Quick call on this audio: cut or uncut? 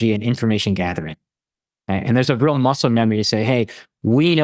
uncut